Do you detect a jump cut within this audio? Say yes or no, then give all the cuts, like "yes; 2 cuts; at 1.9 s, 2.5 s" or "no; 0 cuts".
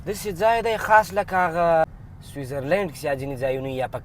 yes; 1 cut; at 1.8 s